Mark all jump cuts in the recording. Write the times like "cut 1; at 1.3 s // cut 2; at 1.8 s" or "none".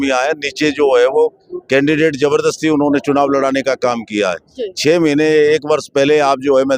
none

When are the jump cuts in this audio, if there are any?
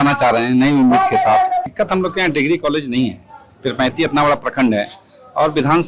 cut 1; at 1.6 s

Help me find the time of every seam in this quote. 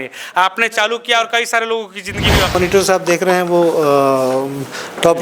cut 1; at 2.6 s

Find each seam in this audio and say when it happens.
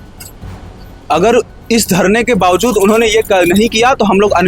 none

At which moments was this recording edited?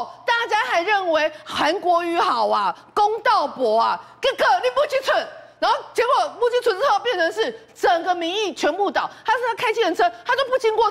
none

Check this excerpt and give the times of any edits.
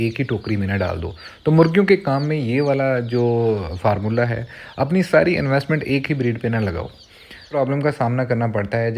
cut 1; at 7.5 s

